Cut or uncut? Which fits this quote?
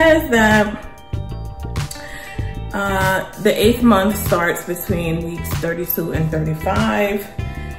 cut